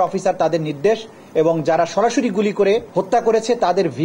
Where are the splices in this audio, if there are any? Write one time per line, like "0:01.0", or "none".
0:02.9